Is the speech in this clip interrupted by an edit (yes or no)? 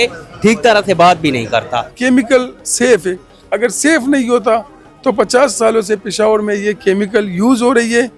yes